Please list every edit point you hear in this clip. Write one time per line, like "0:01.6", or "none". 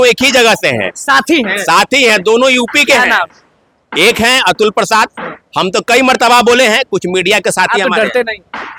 none